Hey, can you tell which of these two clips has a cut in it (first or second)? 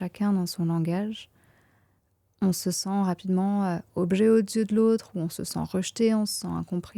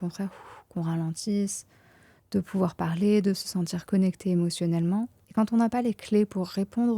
second